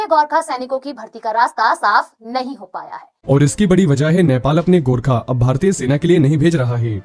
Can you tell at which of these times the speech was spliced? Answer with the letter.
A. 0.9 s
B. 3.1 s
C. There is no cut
B